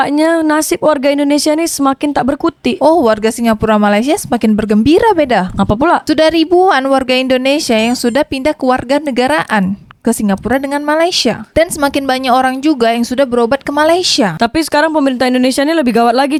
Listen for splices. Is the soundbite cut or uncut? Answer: uncut